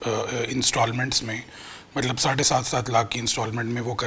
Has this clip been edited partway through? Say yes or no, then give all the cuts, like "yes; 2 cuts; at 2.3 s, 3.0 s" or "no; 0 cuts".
no; 0 cuts